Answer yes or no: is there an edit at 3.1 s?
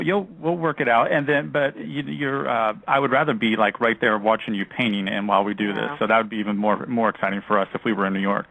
yes